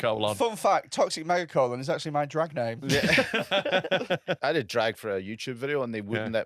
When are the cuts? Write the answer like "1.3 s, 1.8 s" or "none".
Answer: 4.4 s